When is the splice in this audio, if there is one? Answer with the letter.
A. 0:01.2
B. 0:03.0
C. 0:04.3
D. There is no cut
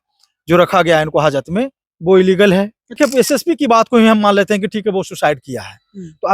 B